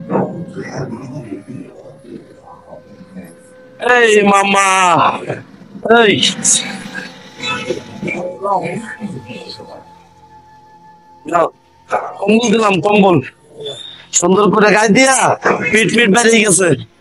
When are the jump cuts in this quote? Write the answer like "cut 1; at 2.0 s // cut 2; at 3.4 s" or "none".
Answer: none